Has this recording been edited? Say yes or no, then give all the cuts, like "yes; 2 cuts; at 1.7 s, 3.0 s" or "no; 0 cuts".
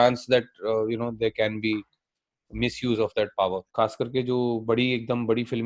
yes; 1 cut; at 3.7 s